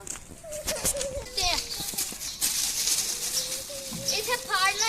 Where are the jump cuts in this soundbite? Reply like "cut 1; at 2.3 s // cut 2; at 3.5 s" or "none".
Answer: cut 1; at 1.3 s